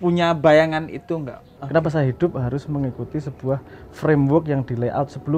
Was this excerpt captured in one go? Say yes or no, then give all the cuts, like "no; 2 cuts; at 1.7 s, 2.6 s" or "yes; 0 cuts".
no; 1 cut; at 1.6 s